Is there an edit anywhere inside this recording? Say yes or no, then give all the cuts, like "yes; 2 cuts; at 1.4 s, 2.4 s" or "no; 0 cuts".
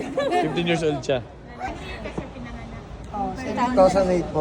yes; 1 cut; at 1.7 s